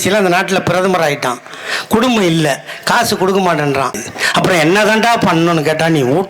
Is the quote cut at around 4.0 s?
yes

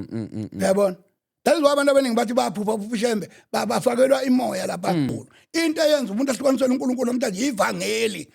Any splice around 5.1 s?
yes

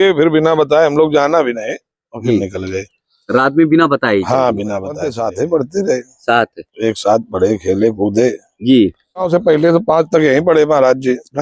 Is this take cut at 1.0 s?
no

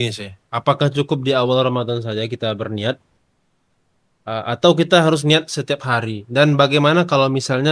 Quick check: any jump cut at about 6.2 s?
no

